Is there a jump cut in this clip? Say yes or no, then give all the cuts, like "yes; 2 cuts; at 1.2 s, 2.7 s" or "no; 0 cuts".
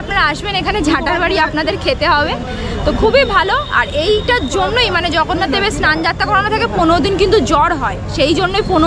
no; 0 cuts